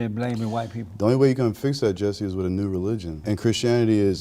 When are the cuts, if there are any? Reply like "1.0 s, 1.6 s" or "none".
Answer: 3.2 s